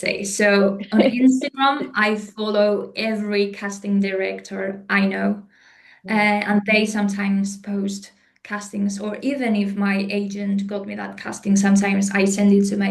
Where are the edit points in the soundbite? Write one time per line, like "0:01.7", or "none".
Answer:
none